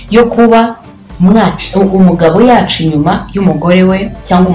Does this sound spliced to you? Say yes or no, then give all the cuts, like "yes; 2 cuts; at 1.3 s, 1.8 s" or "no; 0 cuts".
no; 0 cuts